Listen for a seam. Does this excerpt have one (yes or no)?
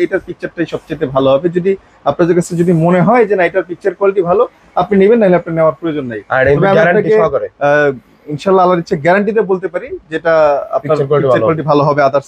no